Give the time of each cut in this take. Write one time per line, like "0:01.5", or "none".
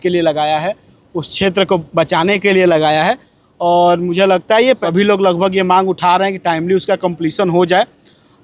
0:04.8